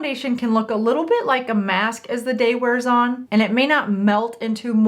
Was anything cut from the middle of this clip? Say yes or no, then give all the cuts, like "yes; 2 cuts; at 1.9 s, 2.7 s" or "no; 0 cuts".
no; 0 cuts